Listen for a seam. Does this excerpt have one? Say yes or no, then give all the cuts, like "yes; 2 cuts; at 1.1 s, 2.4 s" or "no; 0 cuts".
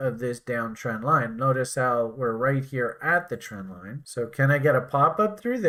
no; 0 cuts